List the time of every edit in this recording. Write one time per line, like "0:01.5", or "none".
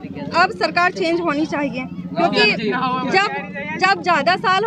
none